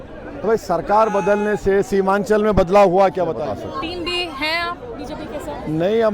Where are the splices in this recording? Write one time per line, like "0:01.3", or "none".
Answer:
0:03.4